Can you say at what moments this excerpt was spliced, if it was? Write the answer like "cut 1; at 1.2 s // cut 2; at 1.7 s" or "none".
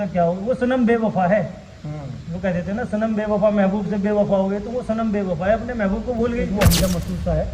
cut 1; at 6.5 s